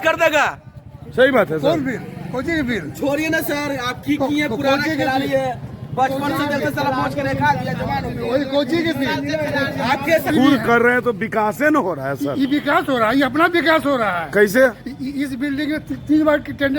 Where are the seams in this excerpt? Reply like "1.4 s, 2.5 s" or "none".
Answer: 10.3 s